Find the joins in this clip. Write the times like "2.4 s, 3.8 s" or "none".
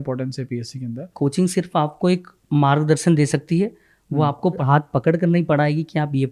1.1 s, 4.6 s

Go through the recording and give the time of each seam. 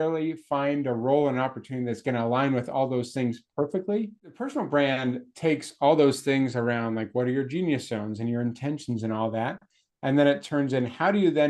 4.2 s

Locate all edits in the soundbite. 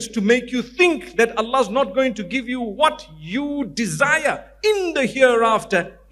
none

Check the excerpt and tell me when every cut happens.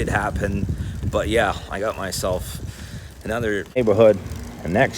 3.8 s

